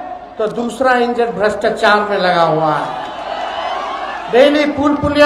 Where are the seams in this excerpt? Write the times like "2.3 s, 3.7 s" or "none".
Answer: none

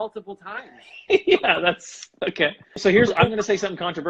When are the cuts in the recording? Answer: 2.8 s

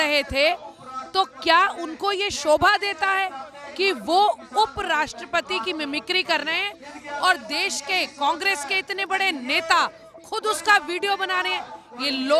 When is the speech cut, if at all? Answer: none

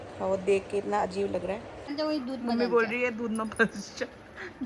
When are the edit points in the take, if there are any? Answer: 1.9 s

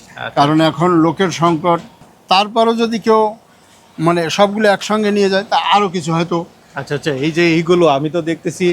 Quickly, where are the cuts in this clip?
2.0 s

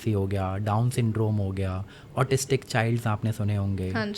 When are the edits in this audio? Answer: none

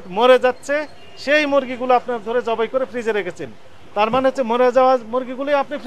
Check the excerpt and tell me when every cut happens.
none

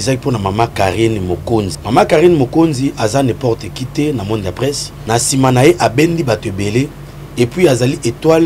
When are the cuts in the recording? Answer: 1.8 s, 4.9 s

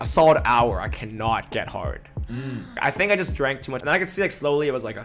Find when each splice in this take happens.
2.7 s, 3.7 s

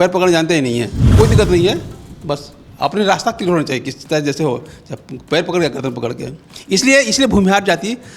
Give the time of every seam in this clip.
1.0 s

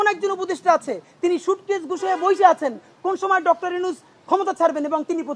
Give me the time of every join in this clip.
none

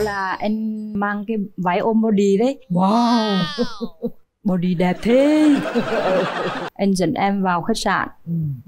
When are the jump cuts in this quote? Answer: 0.9 s, 6.6 s

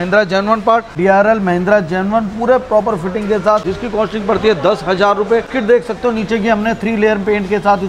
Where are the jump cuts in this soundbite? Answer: 0.9 s, 3.7 s, 5.5 s

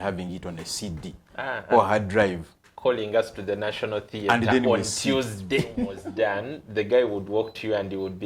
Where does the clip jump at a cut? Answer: 6.0 s

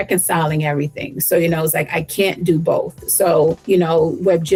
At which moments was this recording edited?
none

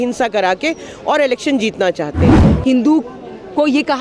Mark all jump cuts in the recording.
2.4 s

